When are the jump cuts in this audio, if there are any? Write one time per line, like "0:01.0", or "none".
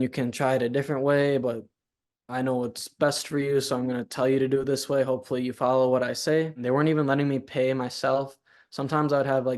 0:06.6